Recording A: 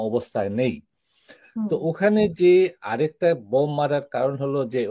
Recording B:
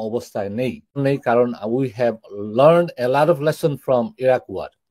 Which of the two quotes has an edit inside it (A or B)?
B